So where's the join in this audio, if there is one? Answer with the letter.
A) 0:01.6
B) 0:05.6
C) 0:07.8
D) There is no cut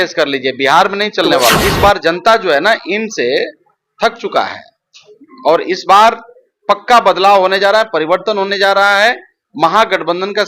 A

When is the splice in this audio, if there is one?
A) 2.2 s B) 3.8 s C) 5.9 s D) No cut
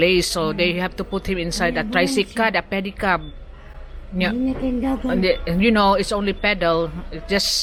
D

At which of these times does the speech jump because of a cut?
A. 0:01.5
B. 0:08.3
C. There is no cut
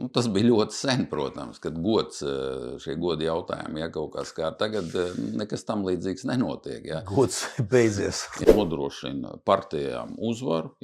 B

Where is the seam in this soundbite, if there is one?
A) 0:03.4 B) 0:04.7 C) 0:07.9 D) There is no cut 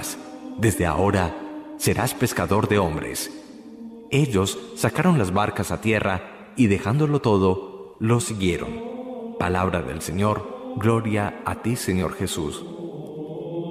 A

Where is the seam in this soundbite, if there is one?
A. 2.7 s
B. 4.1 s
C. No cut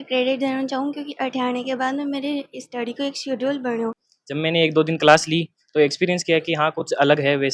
B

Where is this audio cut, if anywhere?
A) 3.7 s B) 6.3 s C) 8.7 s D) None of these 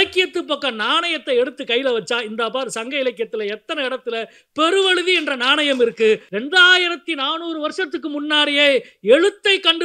B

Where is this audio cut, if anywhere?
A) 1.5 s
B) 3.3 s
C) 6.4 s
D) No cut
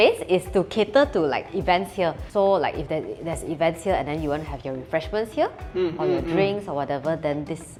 D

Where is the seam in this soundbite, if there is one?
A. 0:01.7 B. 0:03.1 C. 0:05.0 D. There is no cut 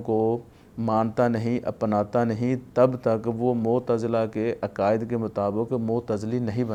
D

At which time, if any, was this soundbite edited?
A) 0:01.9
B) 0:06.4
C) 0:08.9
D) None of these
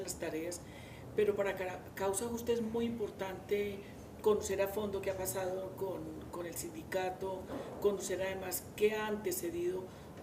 A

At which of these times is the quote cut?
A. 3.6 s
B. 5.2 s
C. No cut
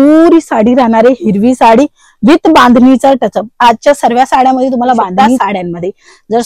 B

